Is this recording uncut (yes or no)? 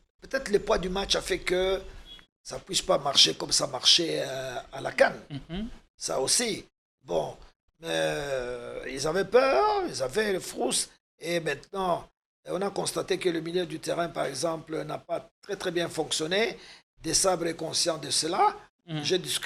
yes